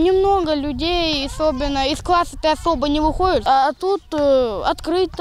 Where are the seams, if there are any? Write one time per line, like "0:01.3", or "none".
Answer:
0:03.4

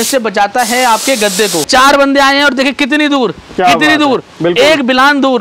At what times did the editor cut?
0:01.7

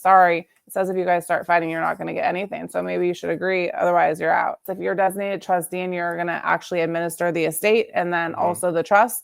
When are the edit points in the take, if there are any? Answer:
0:04.6

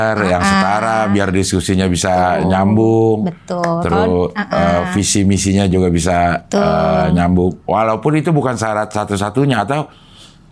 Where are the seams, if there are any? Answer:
none

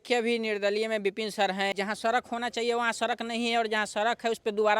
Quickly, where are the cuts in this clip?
0:01.7

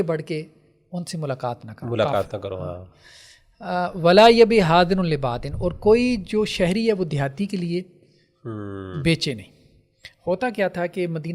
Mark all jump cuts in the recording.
none

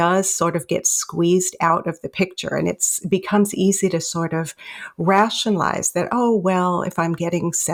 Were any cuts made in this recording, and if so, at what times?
none

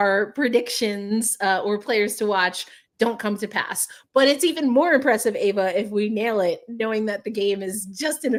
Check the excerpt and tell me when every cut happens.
none

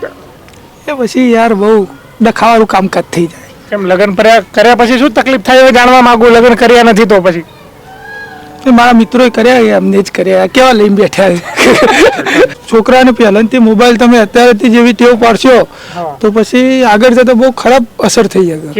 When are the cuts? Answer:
0:12.5

